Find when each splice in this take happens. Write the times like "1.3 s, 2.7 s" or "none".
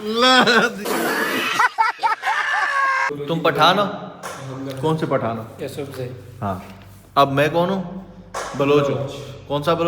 3.1 s